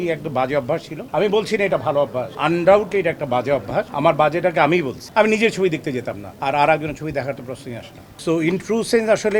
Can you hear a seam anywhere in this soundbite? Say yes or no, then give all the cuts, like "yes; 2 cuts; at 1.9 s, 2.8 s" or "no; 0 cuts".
no; 0 cuts